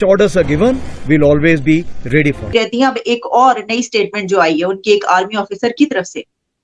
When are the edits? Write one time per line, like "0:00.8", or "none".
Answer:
none